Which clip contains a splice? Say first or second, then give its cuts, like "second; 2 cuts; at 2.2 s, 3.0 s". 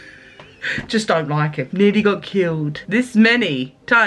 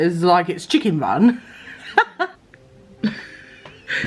second; 1 cut; at 2.3 s